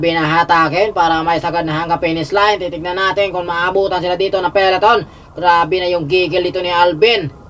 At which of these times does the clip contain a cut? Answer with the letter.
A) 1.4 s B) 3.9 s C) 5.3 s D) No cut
D